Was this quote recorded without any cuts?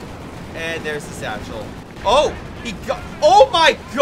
no; 1 cut; at 1.8 s

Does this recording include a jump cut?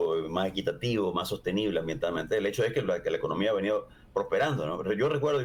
no; 0 cuts

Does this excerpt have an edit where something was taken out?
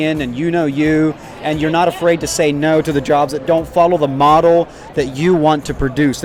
no; 0 cuts

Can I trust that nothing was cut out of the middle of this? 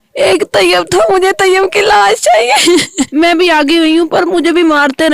no; 1 cut; at 3.1 s

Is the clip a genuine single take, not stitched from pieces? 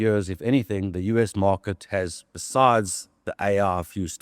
yes; 0 cuts

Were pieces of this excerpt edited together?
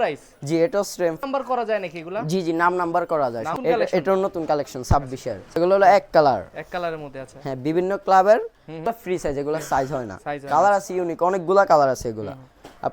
yes; 4 cuts; at 1.2 s, 3.6 s, 5.4 s, 8.9 s

